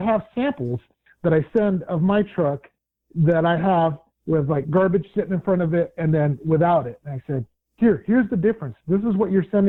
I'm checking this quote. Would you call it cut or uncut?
uncut